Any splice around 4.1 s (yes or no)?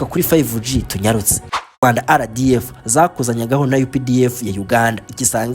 no